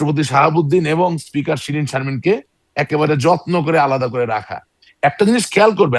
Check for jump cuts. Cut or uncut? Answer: uncut